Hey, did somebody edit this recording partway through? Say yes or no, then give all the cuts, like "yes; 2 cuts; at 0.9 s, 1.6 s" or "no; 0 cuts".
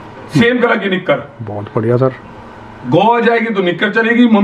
no; 0 cuts